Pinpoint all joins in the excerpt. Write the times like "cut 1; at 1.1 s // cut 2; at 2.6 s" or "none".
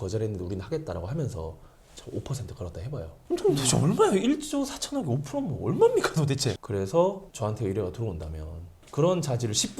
cut 1; at 3.2 s // cut 2; at 6.6 s